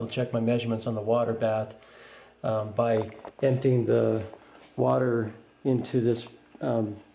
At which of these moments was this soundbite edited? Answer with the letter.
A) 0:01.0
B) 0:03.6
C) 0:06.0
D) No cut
D